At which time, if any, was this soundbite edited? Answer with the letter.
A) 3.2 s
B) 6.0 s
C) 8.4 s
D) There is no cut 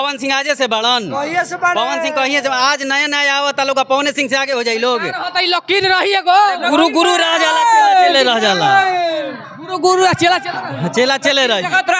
D